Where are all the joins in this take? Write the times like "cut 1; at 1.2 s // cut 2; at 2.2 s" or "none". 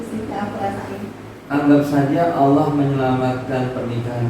cut 1; at 1.3 s